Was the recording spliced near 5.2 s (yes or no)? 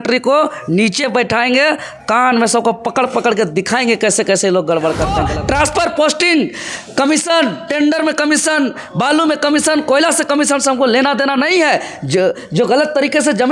yes